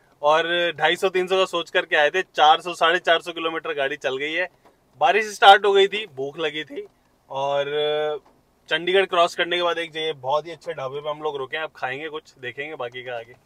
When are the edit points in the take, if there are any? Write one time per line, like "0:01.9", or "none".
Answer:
none